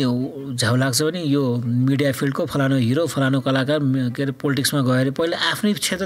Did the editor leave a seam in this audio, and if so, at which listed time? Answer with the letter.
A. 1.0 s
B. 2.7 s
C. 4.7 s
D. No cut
D